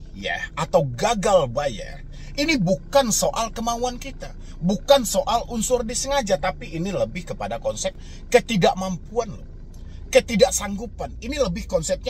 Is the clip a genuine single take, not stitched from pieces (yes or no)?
yes